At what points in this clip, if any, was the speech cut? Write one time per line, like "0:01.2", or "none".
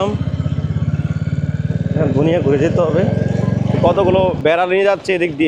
0:03.8